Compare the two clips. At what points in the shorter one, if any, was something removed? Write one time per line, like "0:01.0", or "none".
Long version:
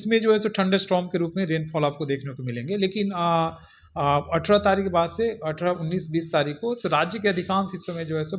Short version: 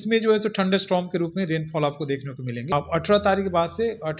0:02.7